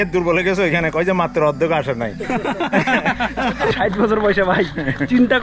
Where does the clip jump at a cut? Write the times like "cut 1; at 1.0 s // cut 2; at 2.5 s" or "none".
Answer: none